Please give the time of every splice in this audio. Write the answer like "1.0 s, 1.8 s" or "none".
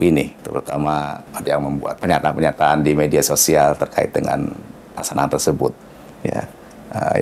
none